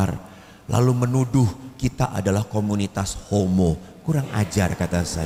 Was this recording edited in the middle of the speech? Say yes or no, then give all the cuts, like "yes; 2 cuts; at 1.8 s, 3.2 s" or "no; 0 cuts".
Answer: no; 0 cuts